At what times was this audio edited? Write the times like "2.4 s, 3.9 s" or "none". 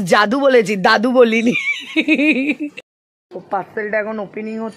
2.8 s

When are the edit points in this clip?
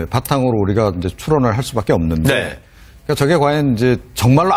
3.6 s

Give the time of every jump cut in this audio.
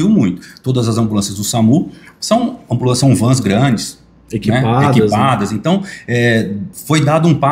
none

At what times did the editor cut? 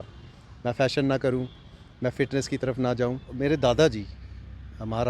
3.3 s

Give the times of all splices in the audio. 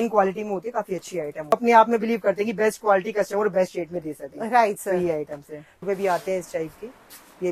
1.5 s, 5.8 s

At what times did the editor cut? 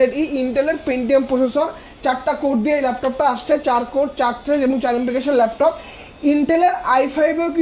none

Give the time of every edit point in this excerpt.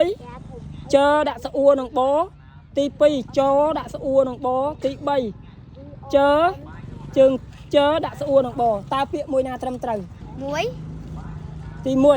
10.2 s

